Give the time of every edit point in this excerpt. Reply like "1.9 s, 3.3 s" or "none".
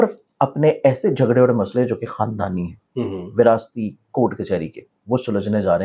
none